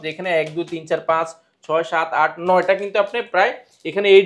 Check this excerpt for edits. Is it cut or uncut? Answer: uncut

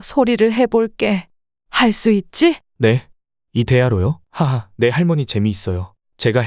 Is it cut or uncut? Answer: cut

